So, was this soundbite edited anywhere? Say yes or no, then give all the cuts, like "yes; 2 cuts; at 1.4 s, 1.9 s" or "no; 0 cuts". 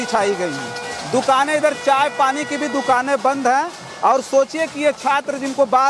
no; 0 cuts